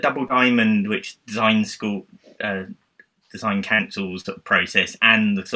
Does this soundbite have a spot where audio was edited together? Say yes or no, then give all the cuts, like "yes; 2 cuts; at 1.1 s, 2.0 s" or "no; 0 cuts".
no; 0 cuts